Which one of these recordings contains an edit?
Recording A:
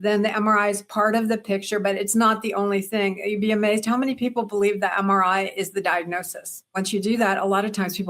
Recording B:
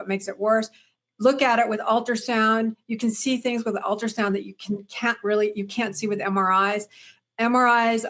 A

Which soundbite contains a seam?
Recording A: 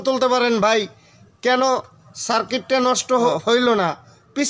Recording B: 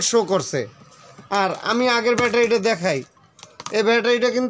A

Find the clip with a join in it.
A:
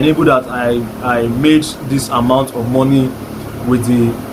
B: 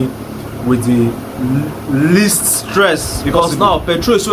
B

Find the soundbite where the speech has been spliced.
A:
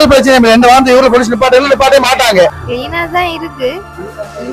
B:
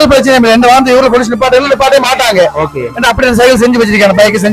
A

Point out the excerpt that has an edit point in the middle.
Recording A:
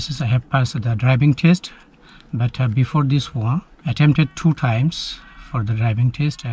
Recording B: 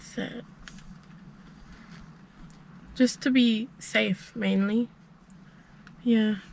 A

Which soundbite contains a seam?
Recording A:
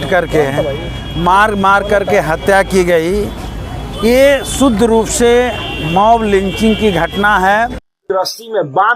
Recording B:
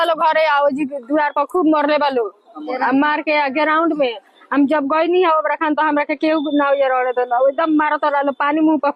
A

